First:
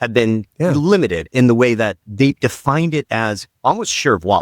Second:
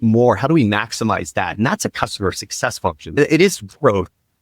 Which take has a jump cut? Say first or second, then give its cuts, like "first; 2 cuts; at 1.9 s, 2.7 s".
second; 1 cut; at 3.1 s